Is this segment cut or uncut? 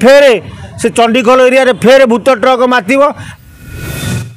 cut